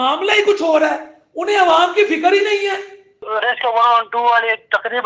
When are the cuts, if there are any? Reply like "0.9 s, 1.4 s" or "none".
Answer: 3.2 s

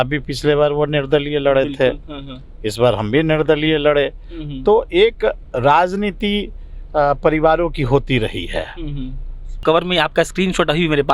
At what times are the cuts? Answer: 9.6 s

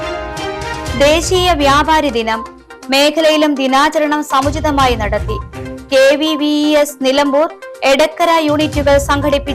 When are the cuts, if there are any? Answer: 0.9 s

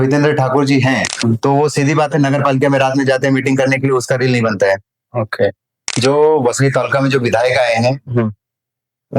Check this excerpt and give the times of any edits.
1.1 s, 6.0 s

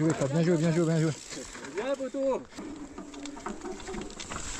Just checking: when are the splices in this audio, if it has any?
2.6 s

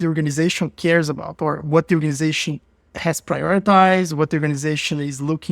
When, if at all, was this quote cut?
none

